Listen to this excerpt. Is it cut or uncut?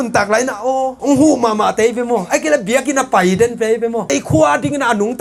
uncut